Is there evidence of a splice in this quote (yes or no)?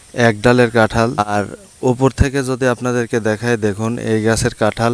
yes